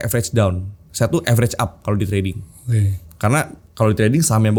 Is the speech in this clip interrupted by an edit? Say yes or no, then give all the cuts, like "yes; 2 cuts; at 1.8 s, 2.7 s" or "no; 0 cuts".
no; 0 cuts